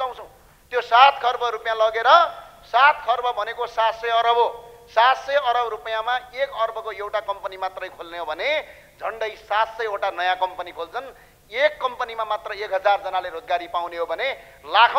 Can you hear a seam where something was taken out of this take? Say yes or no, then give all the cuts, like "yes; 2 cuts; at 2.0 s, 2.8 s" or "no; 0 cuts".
no; 0 cuts